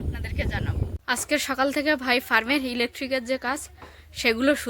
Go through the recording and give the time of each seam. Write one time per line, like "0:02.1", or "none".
0:01.0